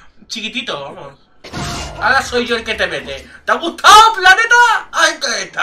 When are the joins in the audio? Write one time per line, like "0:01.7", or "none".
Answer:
0:01.4